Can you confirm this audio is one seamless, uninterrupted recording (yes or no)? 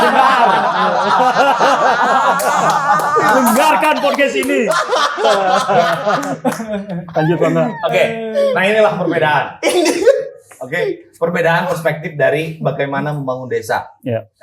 yes